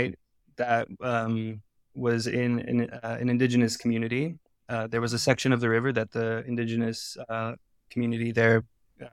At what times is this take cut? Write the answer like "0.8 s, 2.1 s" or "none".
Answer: none